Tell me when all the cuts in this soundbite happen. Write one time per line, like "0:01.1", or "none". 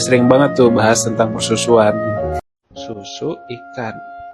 none